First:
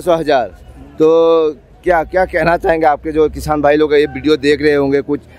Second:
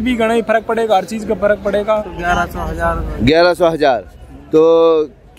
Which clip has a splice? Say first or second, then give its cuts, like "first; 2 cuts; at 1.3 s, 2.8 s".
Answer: second; 1 cut; at 2.0 s